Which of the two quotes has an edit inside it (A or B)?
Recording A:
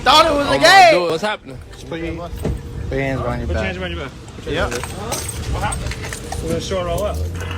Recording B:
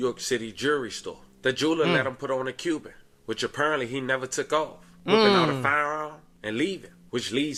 A